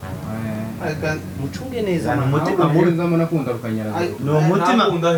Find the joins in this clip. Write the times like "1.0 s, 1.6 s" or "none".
none